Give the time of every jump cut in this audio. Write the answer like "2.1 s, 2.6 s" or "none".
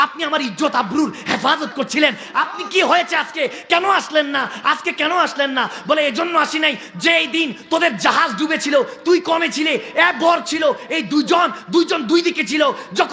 none